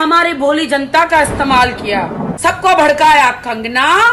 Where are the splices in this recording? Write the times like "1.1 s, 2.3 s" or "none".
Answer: 2.3 s